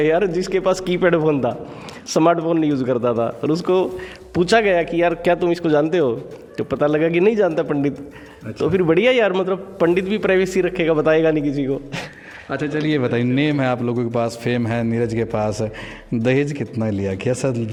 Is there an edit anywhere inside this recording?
no; 0 cuts

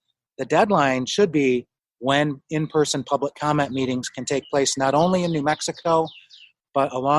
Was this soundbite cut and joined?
no; 0 cuts

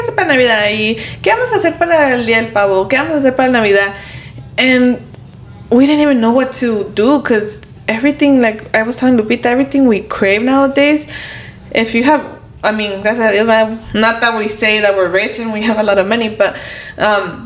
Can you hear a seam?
no; 0 cuts

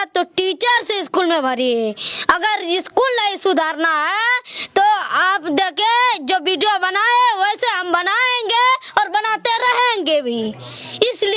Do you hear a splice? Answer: no; 0 cuts

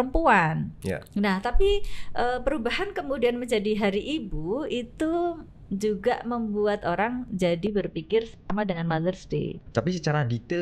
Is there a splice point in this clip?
yes; 1 cut; at 9.6 s

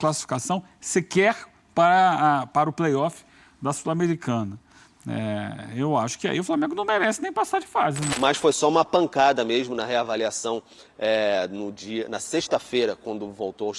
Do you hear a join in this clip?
yes; 1 cut; at 8.1 s

